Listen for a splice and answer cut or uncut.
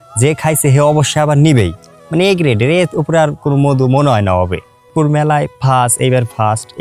cut